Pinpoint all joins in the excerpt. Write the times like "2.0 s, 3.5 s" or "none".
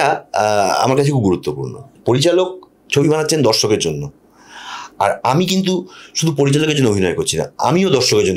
none